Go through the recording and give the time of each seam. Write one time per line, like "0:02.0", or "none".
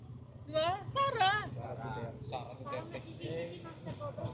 none